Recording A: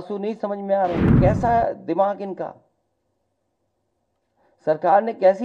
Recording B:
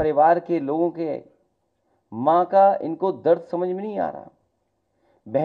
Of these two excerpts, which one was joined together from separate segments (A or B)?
A